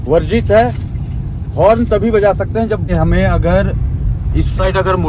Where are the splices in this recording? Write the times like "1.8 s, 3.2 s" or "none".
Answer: 2.8 s